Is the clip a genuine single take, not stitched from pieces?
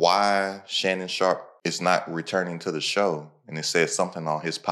no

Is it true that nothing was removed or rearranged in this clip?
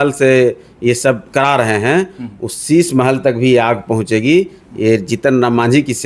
no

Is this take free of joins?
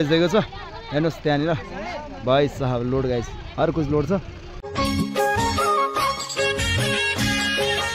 no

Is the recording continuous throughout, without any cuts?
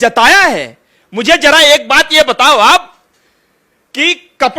yes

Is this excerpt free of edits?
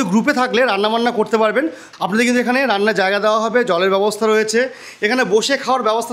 no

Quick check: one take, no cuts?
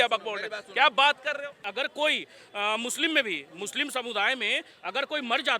no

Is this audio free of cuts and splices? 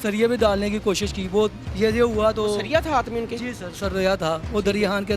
no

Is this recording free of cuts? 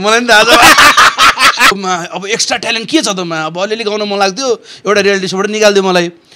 no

